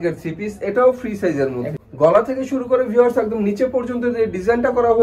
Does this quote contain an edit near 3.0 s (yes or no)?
no